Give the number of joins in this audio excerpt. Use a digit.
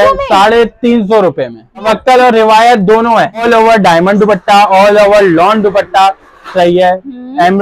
2